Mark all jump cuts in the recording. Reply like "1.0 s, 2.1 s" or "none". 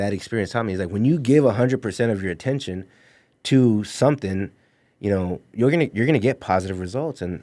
none